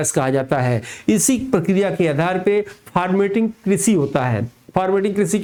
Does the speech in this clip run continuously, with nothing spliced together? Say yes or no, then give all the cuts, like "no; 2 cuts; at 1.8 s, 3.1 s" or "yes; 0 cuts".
yes; 0 cuts